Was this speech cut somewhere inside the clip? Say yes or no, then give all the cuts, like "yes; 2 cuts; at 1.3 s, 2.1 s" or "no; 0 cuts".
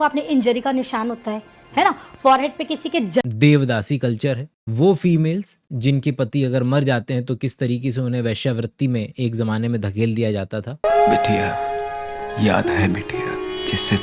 yes; 2 cuts; at 1.9 s, 3.2 s